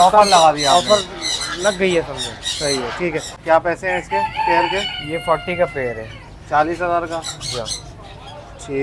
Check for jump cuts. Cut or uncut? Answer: cut